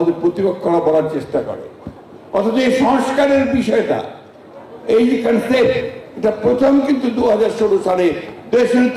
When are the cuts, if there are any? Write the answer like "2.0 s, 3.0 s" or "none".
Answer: none